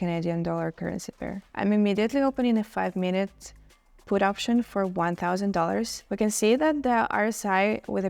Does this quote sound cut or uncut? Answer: cut